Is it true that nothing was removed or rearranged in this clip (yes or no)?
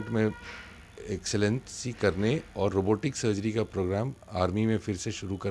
yes